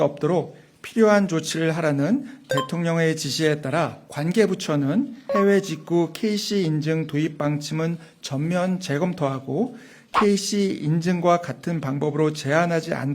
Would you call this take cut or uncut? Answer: cut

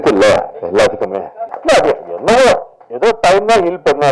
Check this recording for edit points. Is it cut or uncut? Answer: cut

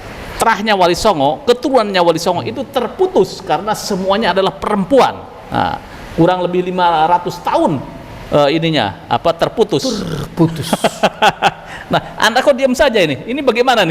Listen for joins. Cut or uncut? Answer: uncut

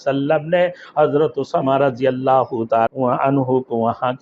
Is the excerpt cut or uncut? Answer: cut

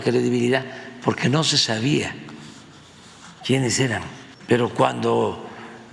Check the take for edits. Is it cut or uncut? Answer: uncut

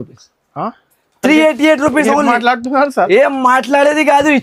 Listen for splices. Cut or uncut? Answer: uncut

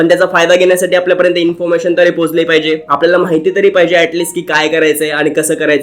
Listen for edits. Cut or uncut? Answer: uncut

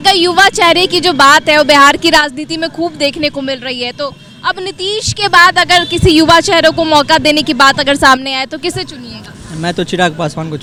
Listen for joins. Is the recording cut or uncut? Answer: uncut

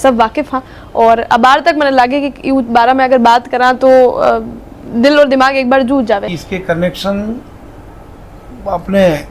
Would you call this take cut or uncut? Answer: cut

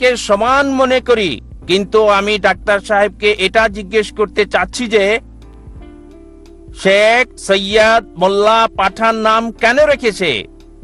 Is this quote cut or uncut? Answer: uncut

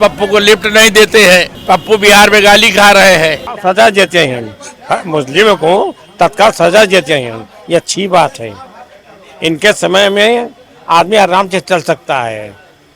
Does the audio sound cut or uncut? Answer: cut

